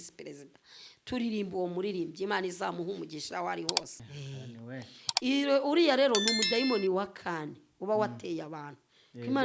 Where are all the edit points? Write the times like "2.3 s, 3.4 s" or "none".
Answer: 3.9 s